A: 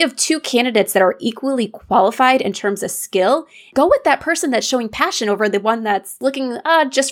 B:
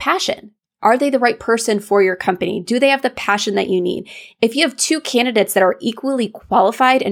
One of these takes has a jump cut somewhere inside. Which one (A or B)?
A